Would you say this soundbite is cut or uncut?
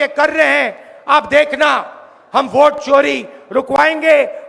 uncut